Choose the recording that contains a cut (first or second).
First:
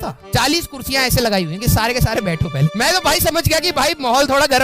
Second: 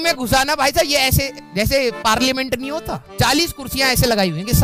first